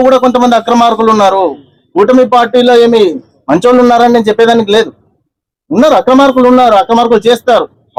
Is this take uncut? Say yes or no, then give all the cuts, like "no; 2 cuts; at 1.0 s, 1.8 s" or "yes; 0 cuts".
yes; 0 cuts